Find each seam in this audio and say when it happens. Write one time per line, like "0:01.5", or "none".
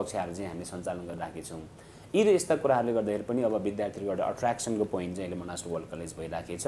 none